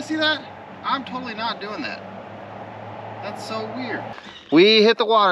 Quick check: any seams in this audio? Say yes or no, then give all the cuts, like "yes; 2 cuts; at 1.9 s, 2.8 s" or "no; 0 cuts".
yes; 1 cut; at 4.2 s